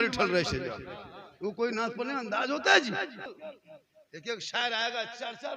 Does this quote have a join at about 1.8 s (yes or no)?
no